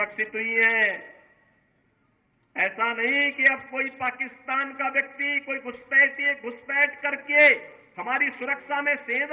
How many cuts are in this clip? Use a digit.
0